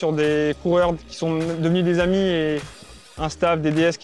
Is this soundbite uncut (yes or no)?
yes